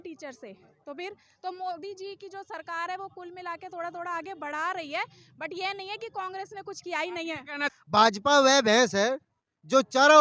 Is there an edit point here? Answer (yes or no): yes